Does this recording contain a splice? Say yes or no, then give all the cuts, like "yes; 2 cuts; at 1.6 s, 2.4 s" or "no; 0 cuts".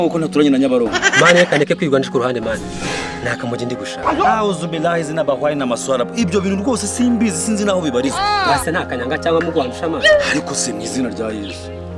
no; 0 cuts